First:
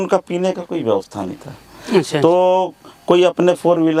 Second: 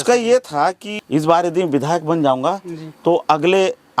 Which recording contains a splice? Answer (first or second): second